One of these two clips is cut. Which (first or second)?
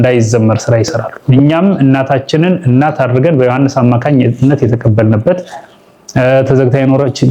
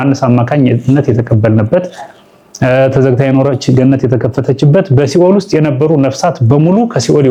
first